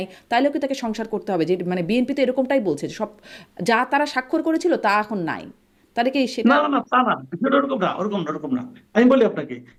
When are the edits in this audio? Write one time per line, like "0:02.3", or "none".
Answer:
none